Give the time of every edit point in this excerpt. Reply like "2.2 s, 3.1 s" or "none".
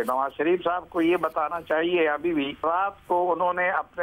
2.6 s